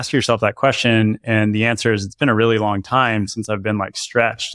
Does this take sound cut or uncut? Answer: uncut